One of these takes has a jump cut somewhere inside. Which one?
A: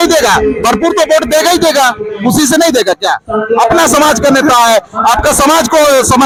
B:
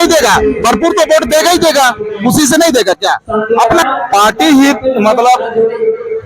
B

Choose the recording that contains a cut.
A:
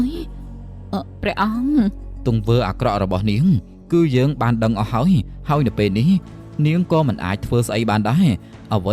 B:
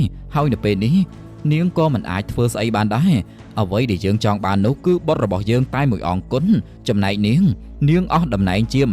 A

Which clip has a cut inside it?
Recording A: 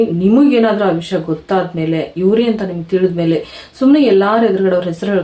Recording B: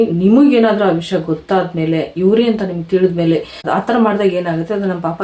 B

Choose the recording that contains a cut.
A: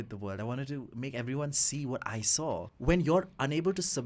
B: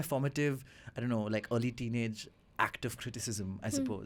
A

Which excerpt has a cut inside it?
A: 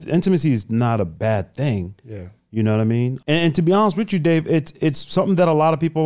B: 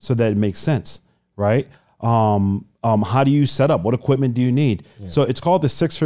A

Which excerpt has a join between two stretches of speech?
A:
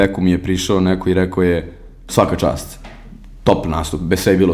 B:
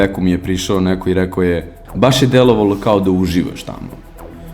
B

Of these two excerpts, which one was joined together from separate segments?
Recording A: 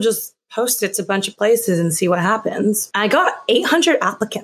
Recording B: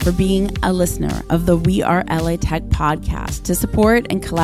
A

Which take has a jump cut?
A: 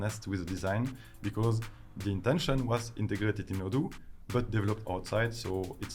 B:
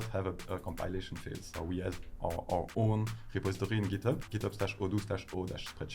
B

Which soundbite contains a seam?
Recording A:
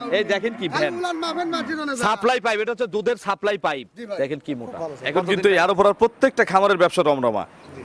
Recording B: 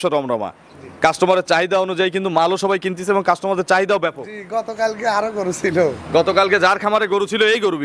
A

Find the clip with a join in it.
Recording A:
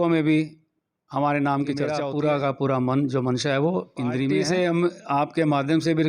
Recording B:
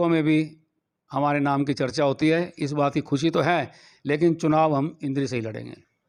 A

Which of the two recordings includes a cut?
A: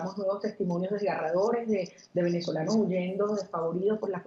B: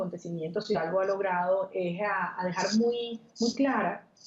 B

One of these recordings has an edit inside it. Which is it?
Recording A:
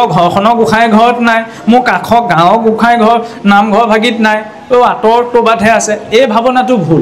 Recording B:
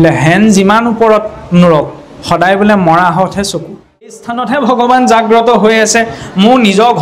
B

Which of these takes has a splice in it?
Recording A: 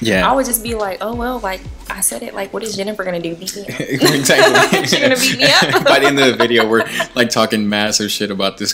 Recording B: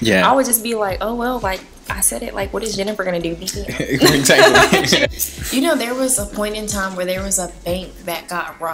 B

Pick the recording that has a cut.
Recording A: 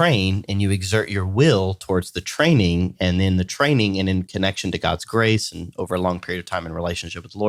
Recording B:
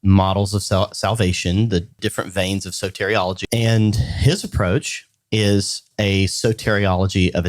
B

